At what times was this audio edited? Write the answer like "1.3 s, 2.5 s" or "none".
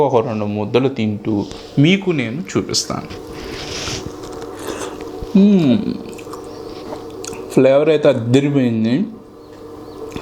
3.2 s